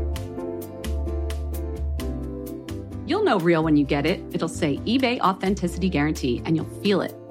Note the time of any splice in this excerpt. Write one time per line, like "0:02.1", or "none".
0:01.4